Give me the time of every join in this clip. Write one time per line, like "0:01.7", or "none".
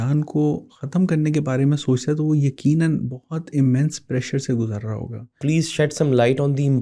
0:05.4